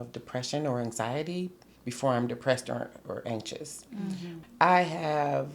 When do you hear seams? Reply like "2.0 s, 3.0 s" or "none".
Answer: 4.3 s